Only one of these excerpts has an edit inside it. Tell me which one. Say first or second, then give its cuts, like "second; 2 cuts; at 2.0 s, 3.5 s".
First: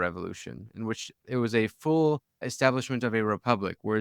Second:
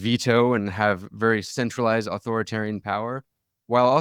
first; 1 cut; at 2.5 s